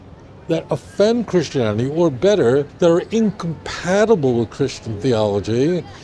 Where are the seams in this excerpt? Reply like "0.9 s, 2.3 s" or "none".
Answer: 2.7 s